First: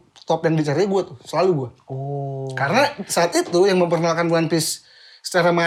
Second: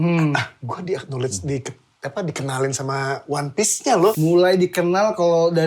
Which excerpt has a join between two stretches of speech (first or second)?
second